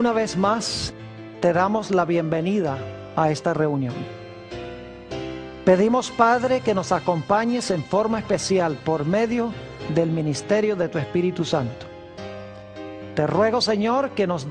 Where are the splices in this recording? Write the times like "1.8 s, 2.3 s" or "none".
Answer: none